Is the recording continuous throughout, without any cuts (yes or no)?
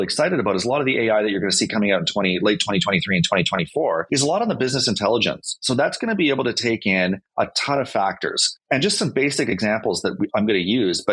no